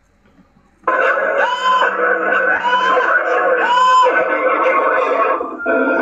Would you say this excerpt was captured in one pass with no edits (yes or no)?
yes